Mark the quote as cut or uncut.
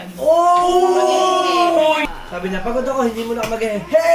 cut